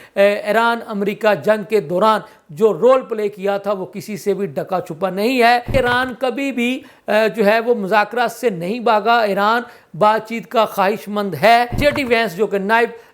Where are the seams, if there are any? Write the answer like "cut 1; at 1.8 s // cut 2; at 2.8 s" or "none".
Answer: cut 1; at 5.7 s // cut 2; at 11.8 s